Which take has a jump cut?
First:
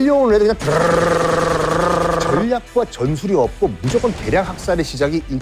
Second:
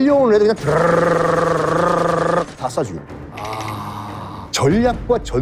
first; 1 cut; at 2.4 s

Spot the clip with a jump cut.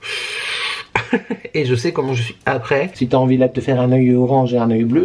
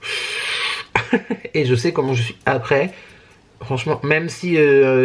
first; 1 cut; at 3.0 s

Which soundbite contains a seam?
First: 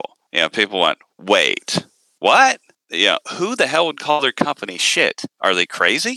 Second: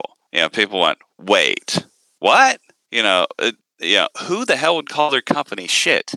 first; 1 cut; at 2.8 s

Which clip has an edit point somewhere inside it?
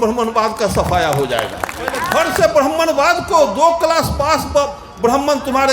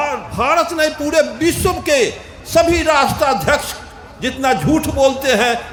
first; 1 cut; at 2.1 s

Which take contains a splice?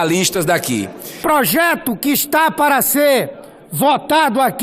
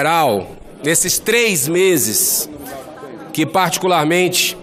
first; 1 cut; at 1.2 s

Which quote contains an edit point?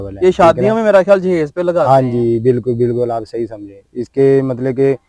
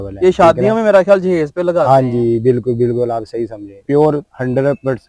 second; 1 cut; at 3.8 s

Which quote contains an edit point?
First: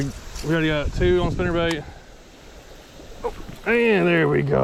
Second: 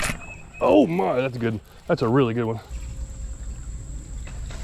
second; 1 cut; at 2.7 s

